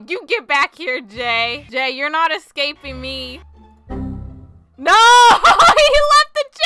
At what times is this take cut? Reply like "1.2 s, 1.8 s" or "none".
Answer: none